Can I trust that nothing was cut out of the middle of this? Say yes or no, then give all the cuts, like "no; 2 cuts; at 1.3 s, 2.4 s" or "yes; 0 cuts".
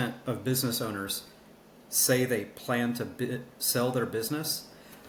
yes; 0 cuts